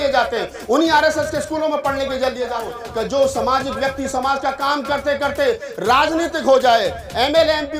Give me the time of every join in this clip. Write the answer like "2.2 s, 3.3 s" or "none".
2.6 s